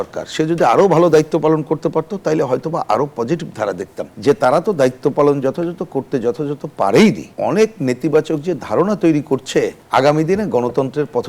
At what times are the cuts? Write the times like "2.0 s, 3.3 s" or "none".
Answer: 4.1 s, 7.3 s, 9.8 s